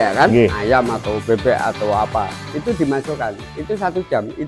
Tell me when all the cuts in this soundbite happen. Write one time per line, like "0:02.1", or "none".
none